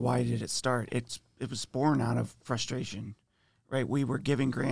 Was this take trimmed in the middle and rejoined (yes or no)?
no